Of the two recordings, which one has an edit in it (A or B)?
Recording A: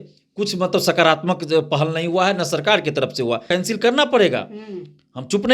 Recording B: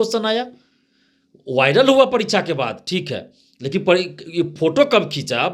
A